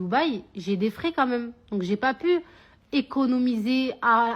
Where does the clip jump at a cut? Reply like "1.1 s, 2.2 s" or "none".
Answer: none